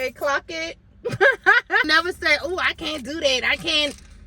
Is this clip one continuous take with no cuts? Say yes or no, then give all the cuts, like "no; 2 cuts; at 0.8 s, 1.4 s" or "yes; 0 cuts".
no; 1 cut; at 1.9 s